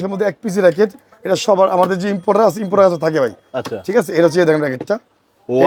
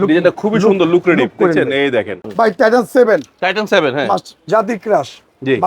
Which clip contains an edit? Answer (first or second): second